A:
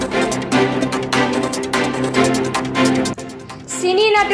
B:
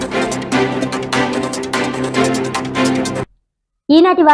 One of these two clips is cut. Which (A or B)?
A